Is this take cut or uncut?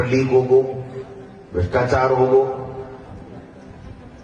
uncut